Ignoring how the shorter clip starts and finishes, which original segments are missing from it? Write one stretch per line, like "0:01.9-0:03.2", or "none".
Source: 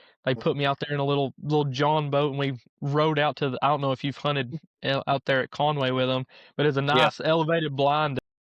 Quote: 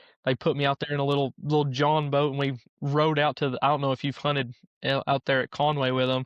none